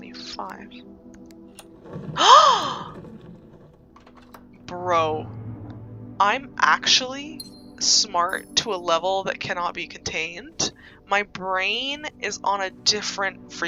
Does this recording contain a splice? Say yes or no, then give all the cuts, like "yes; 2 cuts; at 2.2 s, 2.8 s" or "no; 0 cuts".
no; 0 cuts